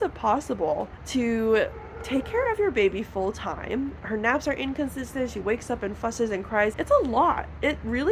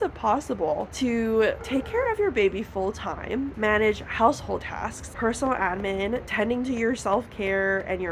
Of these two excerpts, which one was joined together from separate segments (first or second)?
second